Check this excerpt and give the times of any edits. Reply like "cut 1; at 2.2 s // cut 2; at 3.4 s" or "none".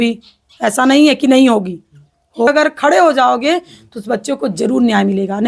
cut 1; at 2.5 s